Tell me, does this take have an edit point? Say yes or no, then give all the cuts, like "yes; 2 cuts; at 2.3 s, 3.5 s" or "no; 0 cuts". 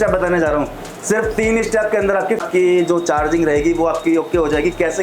no; 0 cuts